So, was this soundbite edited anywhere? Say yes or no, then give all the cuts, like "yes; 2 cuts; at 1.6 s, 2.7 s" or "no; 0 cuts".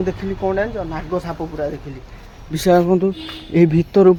no; 0 cuts